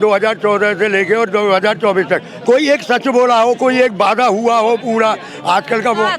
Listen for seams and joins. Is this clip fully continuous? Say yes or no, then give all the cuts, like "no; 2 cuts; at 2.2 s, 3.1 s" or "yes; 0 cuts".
yes; 0 cuts